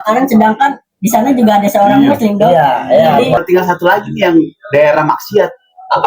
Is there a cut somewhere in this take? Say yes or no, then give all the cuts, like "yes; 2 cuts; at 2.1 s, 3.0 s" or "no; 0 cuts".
yes; 1 cut; at 3.4 s